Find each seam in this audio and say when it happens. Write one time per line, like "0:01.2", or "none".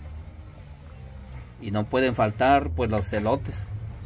0:01.6

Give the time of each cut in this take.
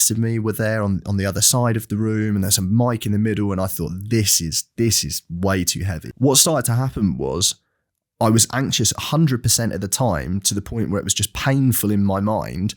0:05.9

